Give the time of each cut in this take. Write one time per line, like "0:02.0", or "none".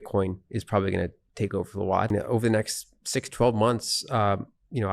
0:02.1